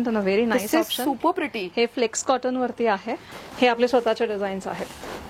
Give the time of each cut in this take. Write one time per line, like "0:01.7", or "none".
0:03.2

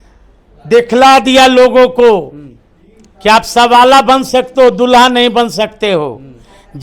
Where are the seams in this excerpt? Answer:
none

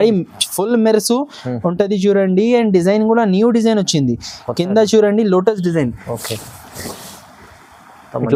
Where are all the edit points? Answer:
none

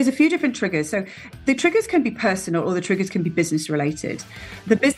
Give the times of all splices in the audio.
0:01.4

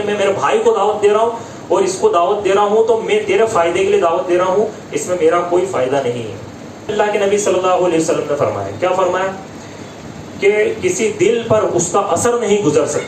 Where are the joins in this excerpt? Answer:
0:06.9

